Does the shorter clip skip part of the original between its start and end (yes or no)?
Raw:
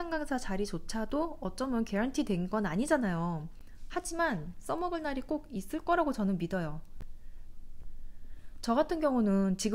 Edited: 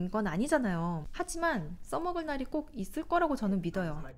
yes